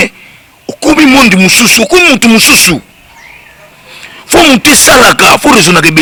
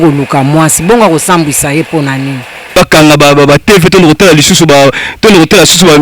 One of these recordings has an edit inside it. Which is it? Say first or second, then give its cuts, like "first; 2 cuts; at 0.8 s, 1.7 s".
second; 1 cut; at 2.8 s